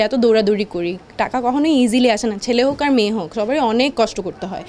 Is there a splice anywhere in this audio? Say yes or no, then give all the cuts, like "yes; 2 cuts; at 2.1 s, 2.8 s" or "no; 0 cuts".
no; 0 cuts